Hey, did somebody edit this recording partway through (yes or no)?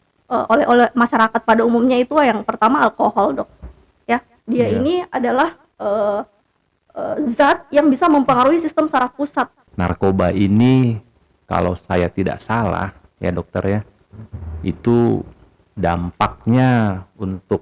yes